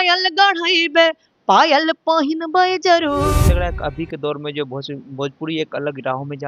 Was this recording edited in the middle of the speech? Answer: yes; 1 cut; at 3.4 s

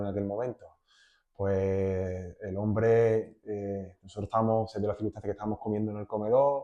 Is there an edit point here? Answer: no; 0 cuts

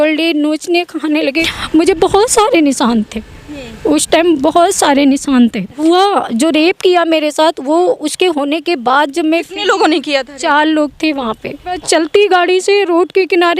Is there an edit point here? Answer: yes; 3 cuts; at 1.5 s, 5.8 s, 11.8 s

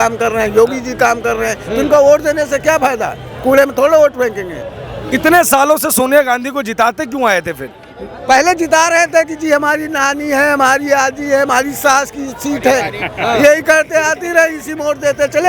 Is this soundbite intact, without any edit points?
yes; 0 cuts

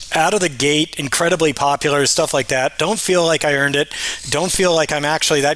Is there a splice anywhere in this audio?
no; 0 cuts

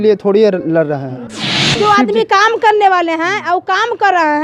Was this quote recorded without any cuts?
no; 1 cut; at 1.7 s

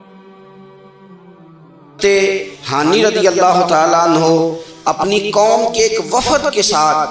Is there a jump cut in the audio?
yes; 1 cut; at 2.0 s

